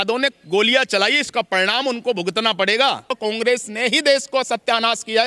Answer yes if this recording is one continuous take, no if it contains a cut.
no